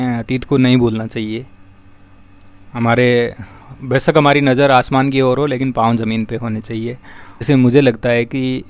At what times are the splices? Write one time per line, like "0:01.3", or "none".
0:07.5